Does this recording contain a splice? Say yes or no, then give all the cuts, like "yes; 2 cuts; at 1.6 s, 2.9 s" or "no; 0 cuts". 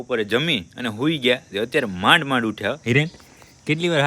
no; 0 cuts